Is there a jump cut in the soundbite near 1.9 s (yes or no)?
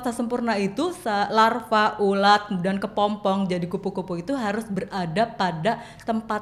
no